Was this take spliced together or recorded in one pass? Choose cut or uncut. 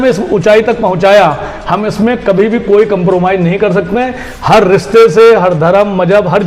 uncut